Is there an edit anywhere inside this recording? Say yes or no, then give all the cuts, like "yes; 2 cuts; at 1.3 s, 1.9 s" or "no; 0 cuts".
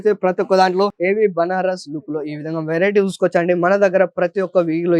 yes; 1 cut; at 1.0 s